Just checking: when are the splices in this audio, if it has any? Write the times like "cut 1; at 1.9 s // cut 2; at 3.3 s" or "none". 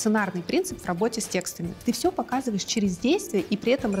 cut 1; at 1.8 s

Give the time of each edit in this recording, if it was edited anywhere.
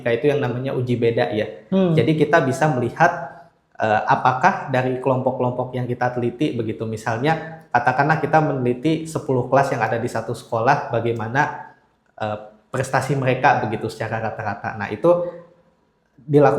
none

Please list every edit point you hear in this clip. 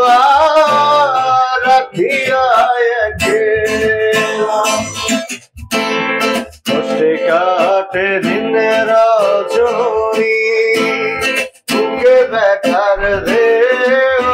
none

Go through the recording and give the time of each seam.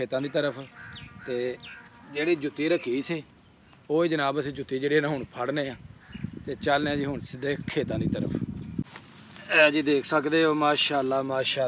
cut 1; at 9.0 s

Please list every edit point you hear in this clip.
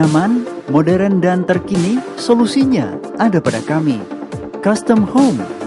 none

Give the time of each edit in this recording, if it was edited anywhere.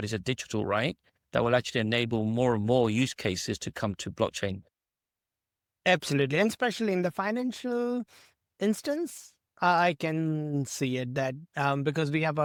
none

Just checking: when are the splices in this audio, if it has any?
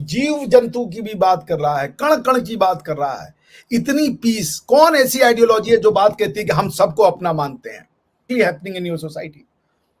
cut 1; at 8.2 s

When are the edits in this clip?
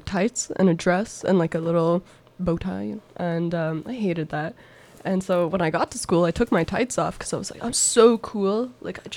cut 1; at 2.2 s

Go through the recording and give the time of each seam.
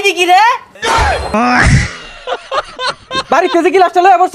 cut 1; at 1.1 s // cut 2; at 3.1 s

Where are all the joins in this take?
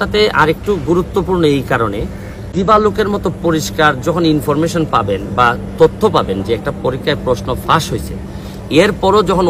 cut 1; at 2.5 s

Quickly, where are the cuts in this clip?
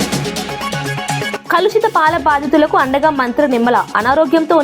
cut 1; at 1.3 s

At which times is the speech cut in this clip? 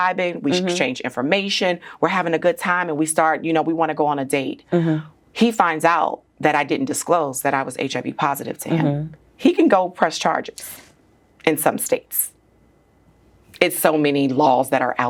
none

